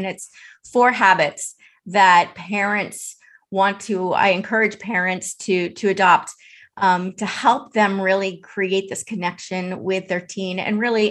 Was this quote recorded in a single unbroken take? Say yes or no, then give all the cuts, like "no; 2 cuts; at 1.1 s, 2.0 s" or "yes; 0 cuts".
yes; 0 cuts